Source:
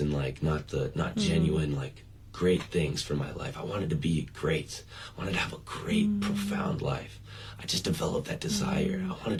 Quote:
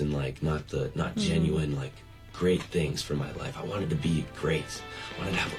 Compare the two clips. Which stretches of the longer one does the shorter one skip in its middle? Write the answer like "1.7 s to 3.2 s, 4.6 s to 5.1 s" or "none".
none